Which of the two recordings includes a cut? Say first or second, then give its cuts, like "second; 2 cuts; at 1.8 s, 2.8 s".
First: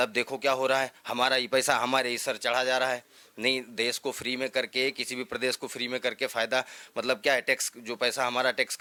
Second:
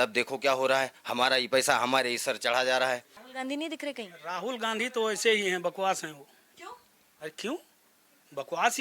second; 1 cut; at 3.2 s